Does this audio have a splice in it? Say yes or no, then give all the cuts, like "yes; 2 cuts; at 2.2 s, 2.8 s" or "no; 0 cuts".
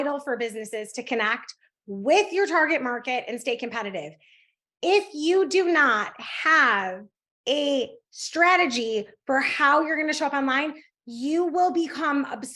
no; 0 cuts